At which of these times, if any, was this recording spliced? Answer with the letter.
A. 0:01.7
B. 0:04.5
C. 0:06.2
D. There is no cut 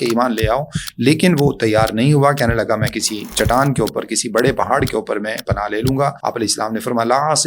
C